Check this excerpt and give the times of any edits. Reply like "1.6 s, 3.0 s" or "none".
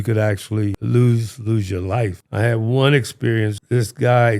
0.8 s, 2.2 s, 3.6 s